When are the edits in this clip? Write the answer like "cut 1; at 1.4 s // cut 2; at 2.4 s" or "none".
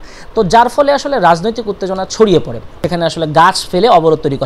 cut 1; at 2.8 s